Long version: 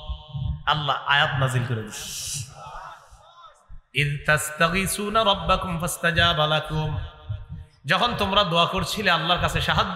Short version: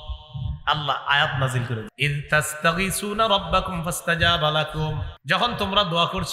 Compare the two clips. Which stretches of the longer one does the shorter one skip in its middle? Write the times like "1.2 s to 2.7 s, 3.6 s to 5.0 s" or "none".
1.9 s to 3.9 s, 7.1 s to 7.7 s